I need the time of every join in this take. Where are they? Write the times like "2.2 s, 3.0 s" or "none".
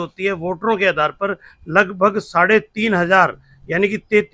none